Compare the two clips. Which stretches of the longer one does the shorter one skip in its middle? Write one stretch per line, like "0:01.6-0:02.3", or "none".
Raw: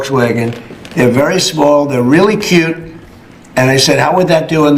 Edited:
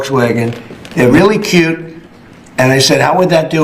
0:01.1-0:02.1